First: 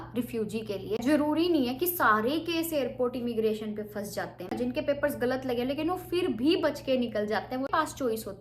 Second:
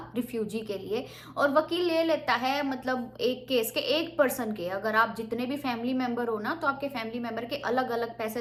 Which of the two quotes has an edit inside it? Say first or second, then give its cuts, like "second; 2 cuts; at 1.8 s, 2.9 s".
first; 3 cuts; at 1.0 s, 4.5 s, 7.7 s